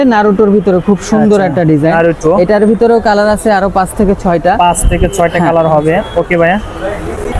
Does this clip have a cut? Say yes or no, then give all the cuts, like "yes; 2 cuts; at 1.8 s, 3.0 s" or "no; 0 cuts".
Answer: no; 0 cuts